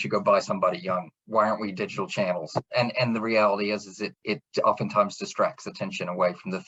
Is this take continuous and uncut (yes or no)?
yes